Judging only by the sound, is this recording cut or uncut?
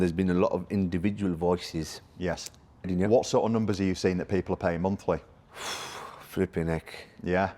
cut